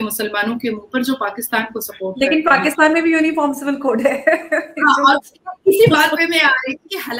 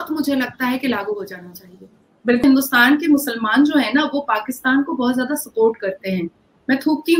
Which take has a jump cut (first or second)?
second